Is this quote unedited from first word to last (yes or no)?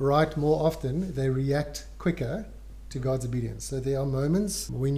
yes